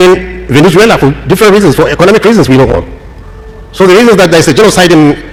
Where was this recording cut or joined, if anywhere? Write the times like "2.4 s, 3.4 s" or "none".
none